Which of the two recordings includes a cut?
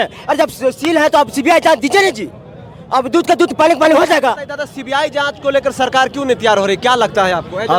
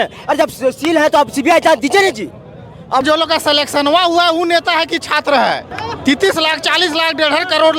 second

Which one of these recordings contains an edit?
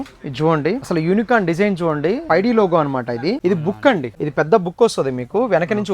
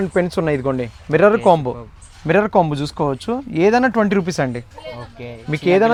first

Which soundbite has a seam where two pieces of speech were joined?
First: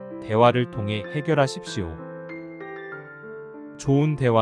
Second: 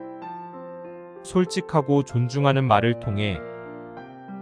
second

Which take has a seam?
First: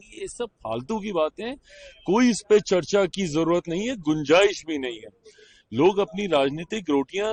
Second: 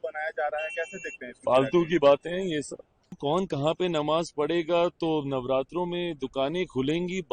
second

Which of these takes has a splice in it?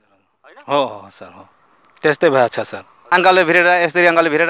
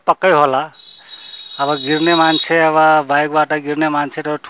first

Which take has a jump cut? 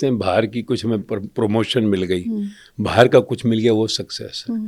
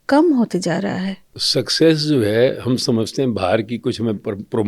second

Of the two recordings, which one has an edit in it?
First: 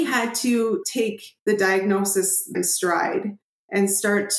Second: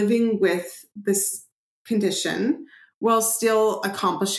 first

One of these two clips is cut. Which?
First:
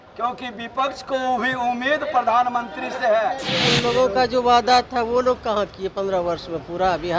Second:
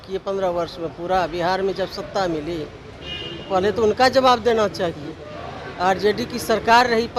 first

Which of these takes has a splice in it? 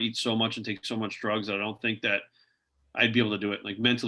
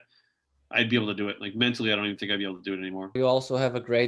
second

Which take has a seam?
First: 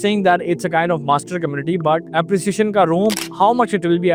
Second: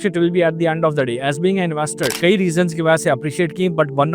second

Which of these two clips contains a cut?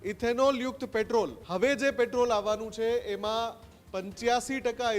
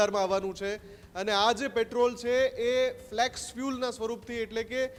first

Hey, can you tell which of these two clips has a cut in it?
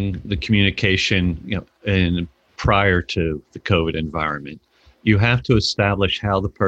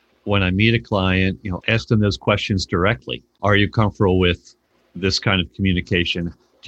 second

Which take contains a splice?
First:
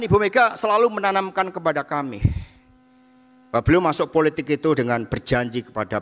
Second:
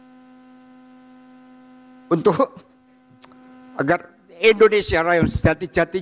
second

